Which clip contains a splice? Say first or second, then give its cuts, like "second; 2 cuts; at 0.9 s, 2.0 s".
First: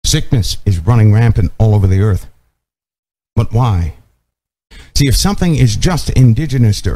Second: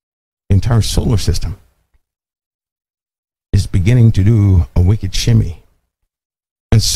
first; 1 cut; at 4.7 s